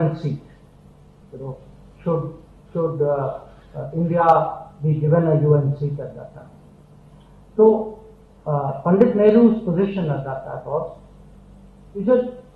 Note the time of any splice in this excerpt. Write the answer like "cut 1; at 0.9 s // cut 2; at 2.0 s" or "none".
none